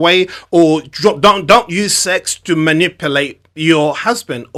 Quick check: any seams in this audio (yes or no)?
no